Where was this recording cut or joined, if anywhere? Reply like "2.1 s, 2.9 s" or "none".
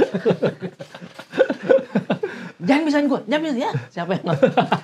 none